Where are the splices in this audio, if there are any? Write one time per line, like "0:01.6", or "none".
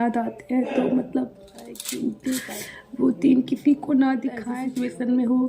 0:02.6
0:04.5